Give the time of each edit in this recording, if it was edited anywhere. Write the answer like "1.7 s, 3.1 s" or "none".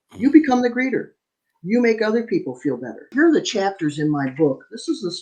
3.1 s